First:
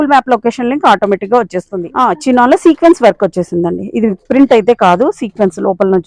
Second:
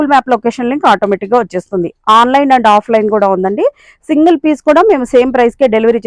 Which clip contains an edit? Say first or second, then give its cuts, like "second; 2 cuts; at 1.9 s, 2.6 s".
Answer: first; 1 cut; at 1.8 s